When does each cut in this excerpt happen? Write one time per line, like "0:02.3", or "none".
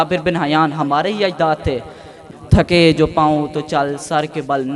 0:02.1